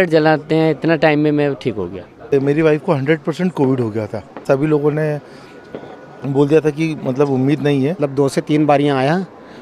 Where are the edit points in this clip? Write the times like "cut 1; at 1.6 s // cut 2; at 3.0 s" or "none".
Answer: cut 1; at 2.3 s // cut 2; at 4.4 s // cut 3; at 8.0 s

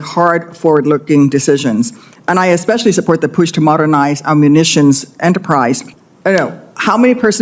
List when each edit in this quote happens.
cut 1; at 5.9 s

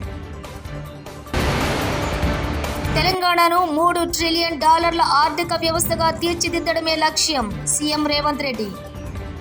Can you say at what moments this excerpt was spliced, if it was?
none

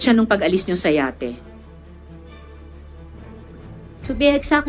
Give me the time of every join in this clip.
cut 1; at 1.4 s // cut 2; at 3.3 s

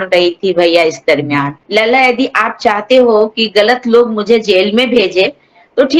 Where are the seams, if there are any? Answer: cut 1; at 1.6 s

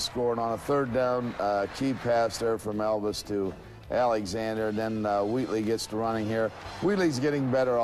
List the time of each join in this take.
cut 1; at 2.6 s

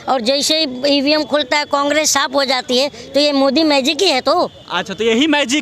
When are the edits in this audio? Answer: none

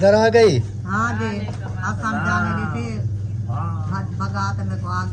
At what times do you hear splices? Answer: none

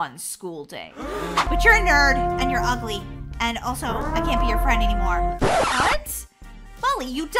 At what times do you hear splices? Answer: cut 1; at 1.5 s

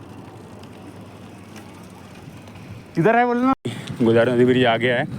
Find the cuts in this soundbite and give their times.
cut 1; at 3.5 s

